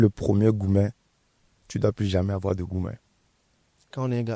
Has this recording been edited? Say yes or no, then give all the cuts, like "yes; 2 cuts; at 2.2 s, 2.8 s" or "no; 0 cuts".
no; 0 cuts